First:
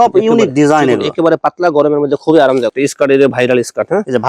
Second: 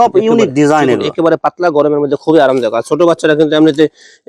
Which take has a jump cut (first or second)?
first